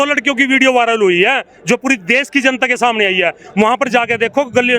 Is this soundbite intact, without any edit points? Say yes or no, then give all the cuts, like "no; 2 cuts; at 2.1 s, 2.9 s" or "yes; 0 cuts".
yes; 0 cuts